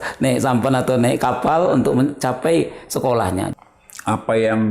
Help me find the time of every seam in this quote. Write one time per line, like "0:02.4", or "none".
0:03.5